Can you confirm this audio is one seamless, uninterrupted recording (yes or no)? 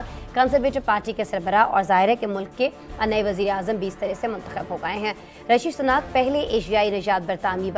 yes